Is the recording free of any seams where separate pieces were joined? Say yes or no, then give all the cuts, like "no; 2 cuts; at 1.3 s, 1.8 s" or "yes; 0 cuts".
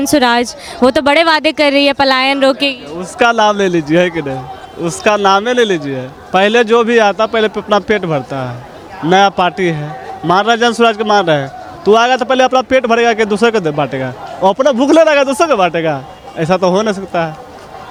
yes; 0 cuts